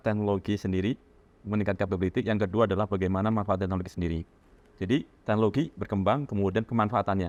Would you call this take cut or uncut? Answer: uncut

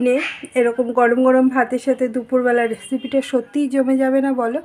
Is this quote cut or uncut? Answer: uncut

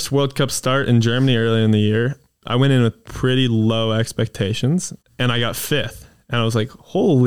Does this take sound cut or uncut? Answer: cut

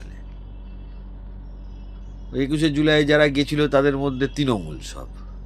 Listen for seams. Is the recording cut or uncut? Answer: uncut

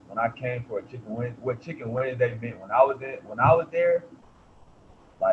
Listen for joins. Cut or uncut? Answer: uncut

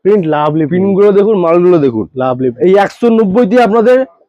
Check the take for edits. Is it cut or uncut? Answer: cut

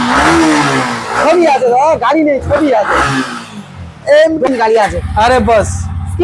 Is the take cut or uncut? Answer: cut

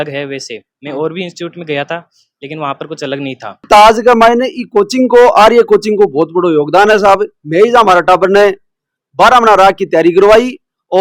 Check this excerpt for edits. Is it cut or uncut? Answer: cut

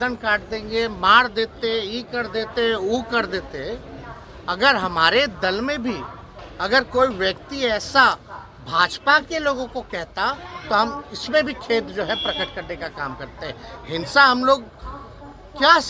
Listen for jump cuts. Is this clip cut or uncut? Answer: uncut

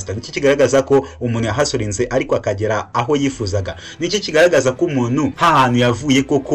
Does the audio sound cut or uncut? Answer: cut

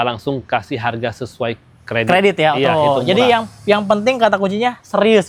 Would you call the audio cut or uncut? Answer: uncut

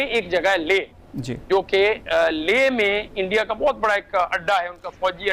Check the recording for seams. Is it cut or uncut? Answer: uncut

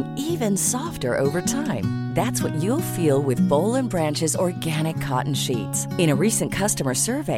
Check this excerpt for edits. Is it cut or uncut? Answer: uncut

